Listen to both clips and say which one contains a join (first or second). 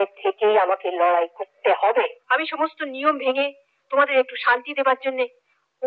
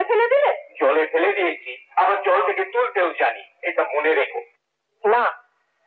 first